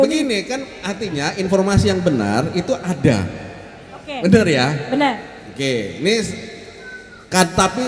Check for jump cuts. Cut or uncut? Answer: uncut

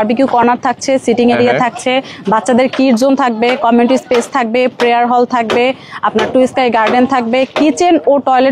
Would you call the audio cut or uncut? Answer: uncut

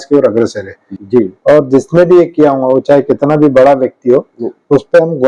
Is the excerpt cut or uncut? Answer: cut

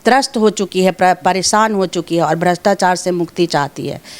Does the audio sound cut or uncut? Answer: uncut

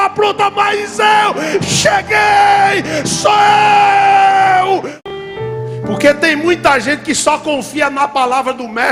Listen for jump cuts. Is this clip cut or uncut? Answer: cut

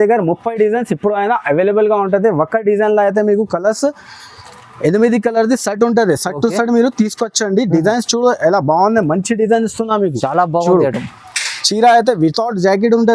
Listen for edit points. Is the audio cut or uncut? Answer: uncut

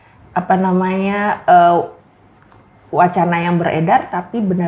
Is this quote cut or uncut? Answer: uncut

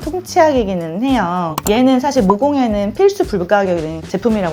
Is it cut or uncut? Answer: cut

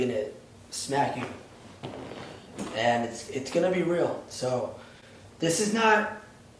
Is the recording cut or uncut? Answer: uncut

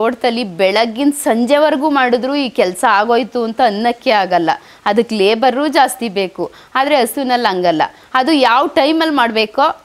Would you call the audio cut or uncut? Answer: uncut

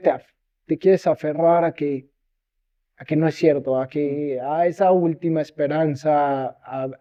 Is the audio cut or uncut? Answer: uncut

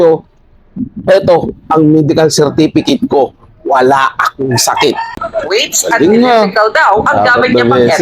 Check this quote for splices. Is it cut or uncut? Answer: cut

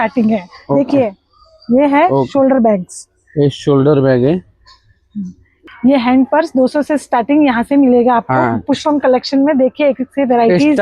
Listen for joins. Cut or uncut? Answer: cut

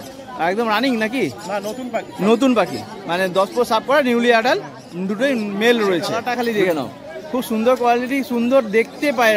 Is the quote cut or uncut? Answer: cut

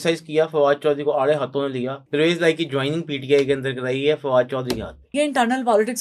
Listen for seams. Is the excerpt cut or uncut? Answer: cut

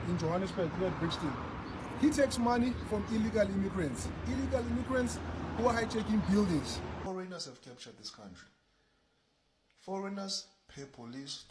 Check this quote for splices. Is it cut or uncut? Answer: cut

